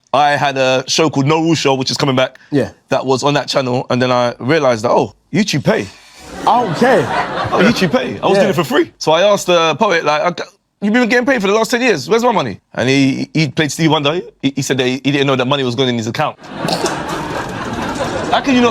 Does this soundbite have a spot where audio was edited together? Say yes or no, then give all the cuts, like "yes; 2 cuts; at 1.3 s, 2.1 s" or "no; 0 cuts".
yes; 1 cut; at 10.9 s